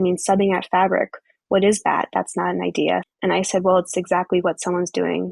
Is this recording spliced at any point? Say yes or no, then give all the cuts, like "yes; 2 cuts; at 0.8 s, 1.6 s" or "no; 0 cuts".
yes; 1 cut; at 3.1 s